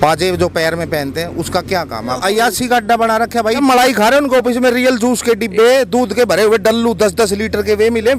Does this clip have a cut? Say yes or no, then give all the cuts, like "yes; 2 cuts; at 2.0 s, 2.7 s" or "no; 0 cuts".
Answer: yes; 2 cuts; at 2.1 s, 3.6 s